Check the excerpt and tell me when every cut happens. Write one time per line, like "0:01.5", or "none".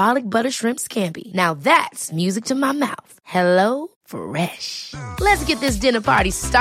none